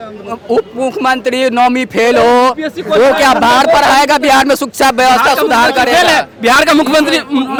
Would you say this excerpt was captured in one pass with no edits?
yes; 0 cuts

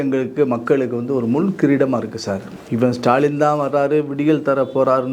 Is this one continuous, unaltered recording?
yes; 0 cuts

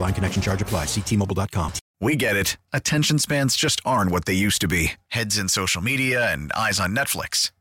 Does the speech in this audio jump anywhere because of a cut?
yes; 1 cut; at 1.8 s

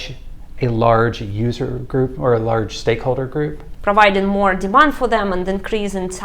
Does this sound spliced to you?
yes; 1 cut; at 3.7 s

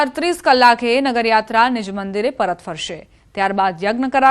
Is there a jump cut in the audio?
yes; 1 cut; at 1.4 s

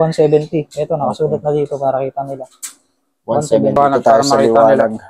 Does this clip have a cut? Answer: yes; 1 cut; at 3.8 s

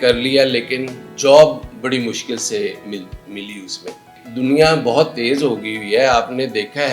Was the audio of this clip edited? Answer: yes; 2 cuts; at 1.1 s, 4.2 s

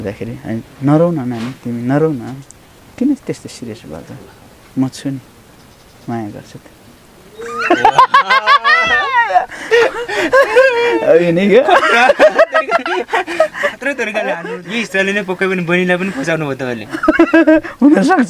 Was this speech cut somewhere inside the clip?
yes; 1 cut; at 14.5 s

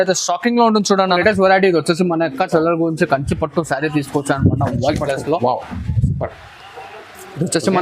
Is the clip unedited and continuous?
no; 1 cut; at 1.2 s

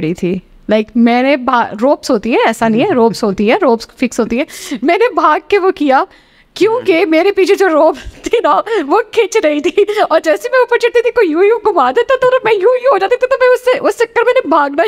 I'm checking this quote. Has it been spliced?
no; 0 cuts

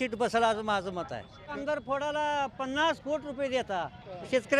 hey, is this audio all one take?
no; 1 cut; at 1.5 s

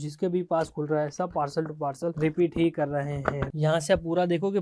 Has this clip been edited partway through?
yes; 2 cuts; at 2.2 s, 3.5 s

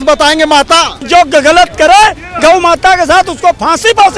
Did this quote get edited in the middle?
yes; 1 cut; at 1.0 s

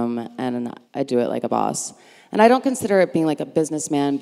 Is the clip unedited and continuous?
no; 1 cut; at 1.1 s

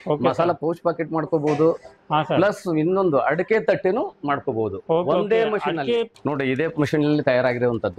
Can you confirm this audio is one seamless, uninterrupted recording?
no; 1 cut; at 6.1 s

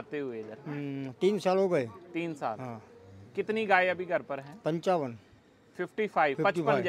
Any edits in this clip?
no; 0 cuts

